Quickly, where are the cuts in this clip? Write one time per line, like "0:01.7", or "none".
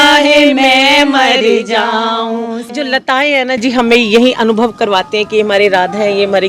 0:02.7